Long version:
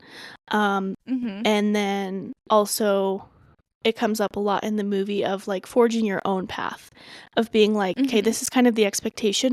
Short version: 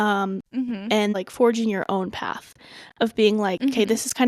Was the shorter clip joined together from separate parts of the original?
yes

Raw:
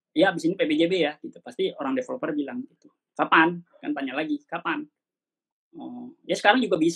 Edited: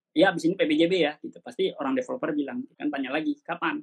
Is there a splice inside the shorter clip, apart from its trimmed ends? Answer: yes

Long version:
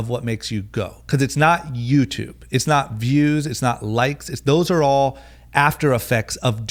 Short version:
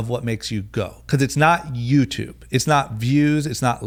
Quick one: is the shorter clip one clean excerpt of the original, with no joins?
yes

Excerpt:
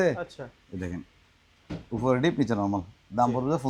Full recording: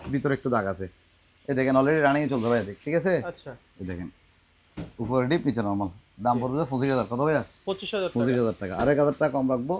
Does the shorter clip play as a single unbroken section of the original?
yes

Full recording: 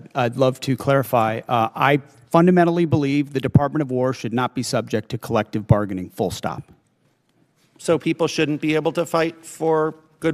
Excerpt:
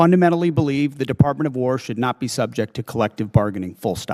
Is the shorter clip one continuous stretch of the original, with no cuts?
yes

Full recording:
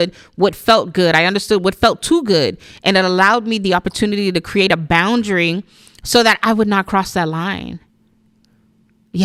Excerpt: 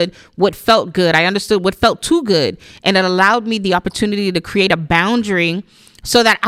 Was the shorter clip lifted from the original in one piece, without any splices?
yes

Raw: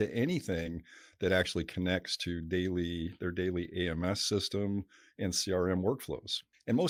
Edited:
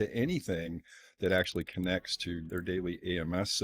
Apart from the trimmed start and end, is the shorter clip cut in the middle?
yes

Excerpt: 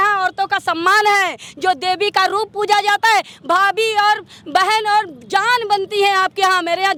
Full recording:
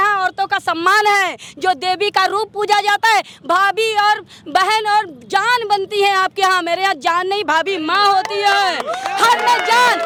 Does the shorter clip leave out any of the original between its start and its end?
no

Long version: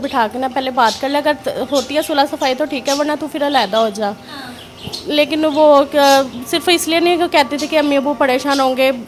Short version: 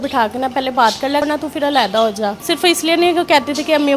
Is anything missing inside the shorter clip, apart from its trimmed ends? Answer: yes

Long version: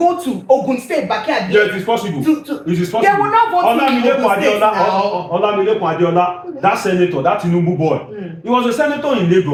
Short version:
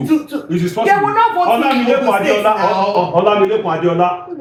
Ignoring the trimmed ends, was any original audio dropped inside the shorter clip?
no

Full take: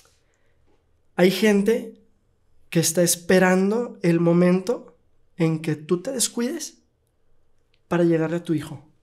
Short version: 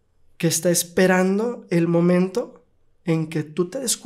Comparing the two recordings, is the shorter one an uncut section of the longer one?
yes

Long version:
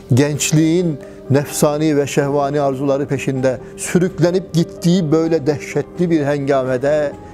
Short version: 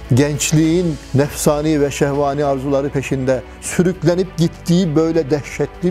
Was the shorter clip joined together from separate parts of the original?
yes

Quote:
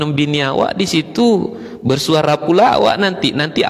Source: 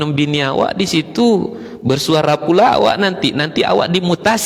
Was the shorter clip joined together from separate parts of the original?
no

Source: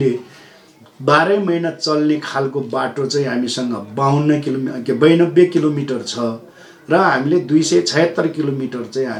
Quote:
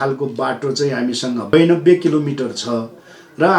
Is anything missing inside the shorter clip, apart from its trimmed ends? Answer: yes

